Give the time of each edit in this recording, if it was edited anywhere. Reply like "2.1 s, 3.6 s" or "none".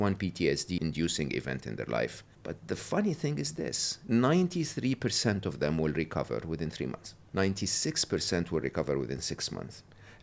0.8 s, 2.3 s, 3.9 s, 7.2 s